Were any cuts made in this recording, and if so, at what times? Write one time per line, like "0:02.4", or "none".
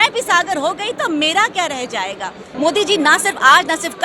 0:02.5